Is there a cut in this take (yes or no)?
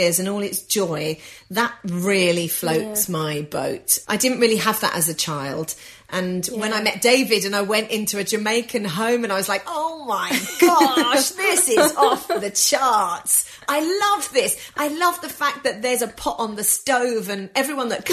yes